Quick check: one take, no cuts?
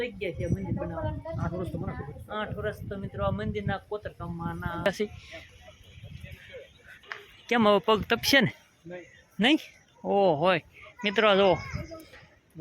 no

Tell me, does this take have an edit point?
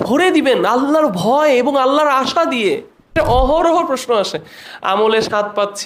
yes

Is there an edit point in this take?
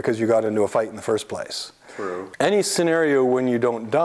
no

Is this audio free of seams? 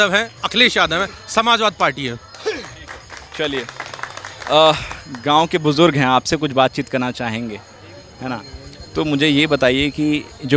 yes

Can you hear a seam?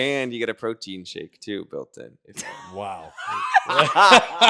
no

